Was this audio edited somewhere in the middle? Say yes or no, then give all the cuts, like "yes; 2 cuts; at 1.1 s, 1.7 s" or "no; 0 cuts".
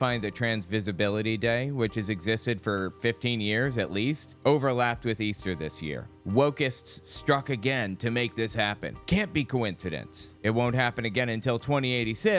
no; 0 cuts